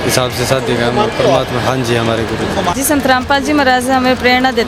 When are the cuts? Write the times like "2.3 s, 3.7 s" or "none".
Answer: 2.7 s